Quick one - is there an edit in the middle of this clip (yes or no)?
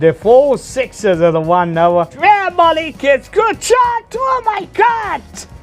yes